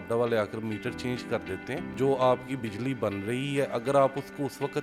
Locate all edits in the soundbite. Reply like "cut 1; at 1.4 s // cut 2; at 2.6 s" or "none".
cut 1; at 1.9 s